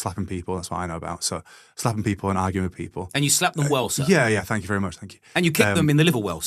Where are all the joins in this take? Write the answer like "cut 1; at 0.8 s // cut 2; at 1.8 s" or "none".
none